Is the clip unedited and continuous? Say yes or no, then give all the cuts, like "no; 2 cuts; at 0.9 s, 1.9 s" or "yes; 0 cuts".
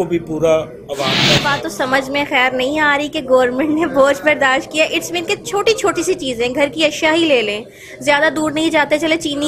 no; 1 cut; at 1.4 s